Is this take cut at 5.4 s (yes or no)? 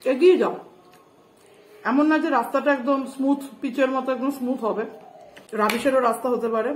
yes